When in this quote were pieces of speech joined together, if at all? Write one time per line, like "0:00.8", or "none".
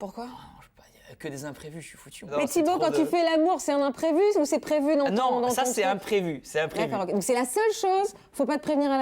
0:02.3